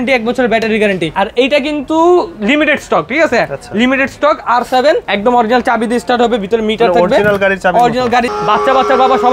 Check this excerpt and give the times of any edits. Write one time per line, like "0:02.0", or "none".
0:01.1
0:05.1
0:08.3